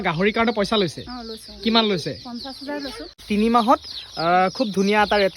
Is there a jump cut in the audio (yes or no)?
yes